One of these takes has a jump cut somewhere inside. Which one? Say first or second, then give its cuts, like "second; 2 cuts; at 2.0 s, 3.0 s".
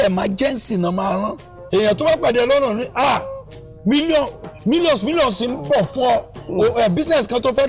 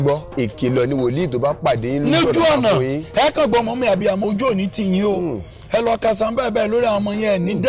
first; 1 cut; at 1.6 s